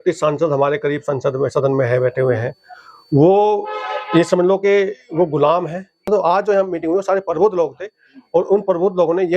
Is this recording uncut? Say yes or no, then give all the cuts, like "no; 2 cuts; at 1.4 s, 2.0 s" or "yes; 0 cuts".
no; 1 cut; at 6.1 s